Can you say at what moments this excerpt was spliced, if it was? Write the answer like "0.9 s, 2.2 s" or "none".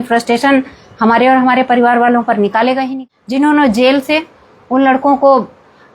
2.9 s